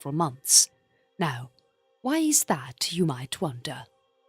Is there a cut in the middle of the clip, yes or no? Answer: yes